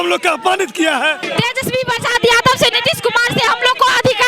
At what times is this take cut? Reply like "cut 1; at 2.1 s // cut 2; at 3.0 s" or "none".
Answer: cut 1; at 1.2 s // cut 2; at 2.8 s